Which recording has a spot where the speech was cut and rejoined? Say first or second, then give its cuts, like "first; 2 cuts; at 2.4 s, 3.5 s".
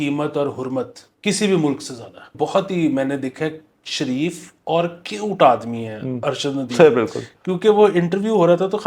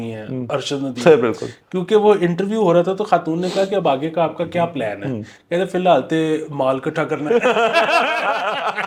first; 2 cuts; at 1.0 s, 2.3 s